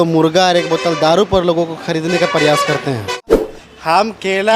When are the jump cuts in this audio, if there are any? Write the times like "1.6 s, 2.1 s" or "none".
3.3 s